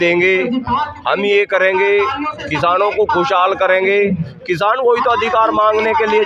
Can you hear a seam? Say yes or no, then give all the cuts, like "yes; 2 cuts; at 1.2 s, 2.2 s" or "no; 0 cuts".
no; 0 cuts